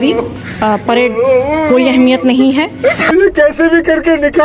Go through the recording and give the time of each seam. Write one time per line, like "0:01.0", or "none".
none